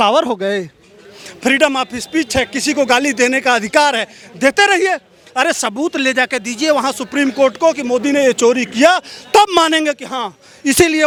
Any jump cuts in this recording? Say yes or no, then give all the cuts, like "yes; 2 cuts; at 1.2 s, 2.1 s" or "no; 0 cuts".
no; 0 cuts